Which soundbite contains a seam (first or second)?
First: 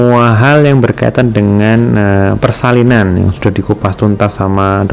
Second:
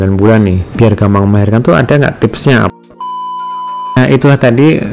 second